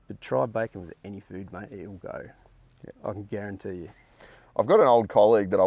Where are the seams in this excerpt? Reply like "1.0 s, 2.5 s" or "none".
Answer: none

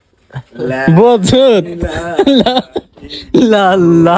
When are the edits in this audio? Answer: none

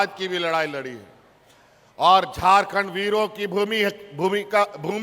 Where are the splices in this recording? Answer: none

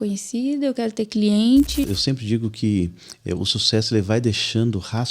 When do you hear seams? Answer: 1.9 s

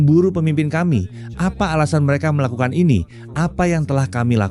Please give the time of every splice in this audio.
1.2 s

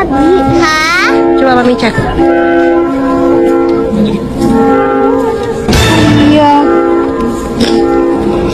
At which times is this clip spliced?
none

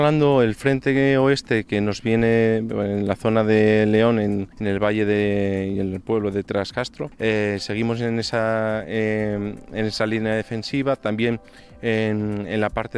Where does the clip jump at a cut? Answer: 4.5 s, 7.0 s

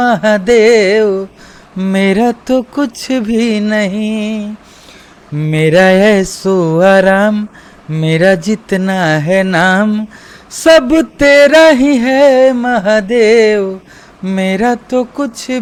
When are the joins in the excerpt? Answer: none

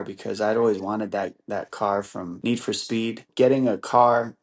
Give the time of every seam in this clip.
2.3 s, 3.3 s

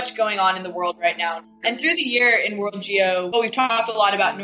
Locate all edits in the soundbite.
1.5 s, 3.5 s

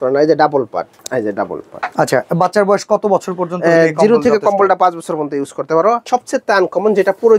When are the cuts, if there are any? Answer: 1.0 s, 6.0 s

